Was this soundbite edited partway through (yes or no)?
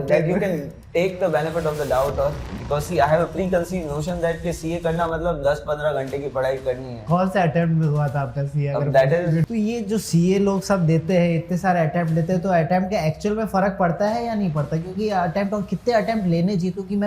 yes